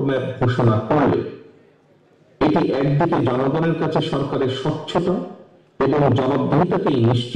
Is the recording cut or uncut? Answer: uncut